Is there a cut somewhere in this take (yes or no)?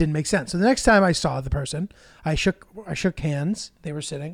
no